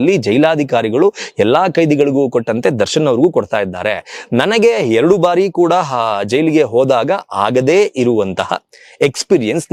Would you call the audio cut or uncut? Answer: uncut